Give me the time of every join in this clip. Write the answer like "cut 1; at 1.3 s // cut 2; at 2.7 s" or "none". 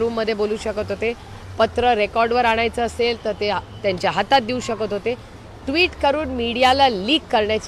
none